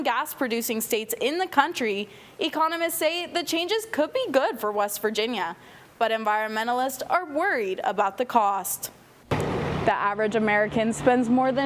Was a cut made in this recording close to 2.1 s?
no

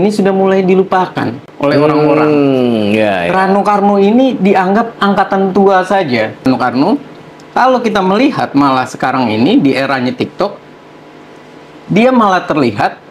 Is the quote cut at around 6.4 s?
yes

